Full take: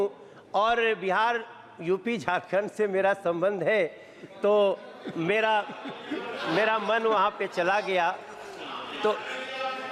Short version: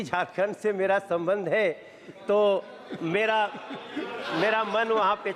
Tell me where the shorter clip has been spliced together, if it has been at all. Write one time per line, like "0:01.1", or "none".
none